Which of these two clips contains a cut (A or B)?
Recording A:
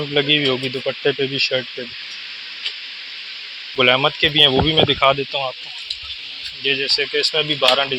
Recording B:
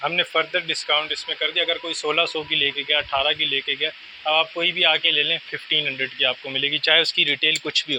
A